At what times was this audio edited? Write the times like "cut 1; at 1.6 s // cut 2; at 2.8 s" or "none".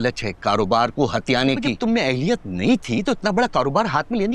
cut 1; at 1.8 s

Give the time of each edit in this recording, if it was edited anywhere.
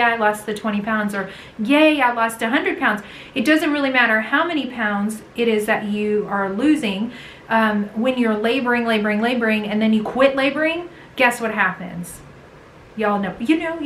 none

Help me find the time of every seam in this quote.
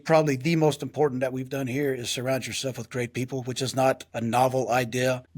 cut 1; at 4.1 s

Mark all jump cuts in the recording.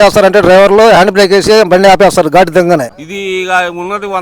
cut 1; at 2.9 s

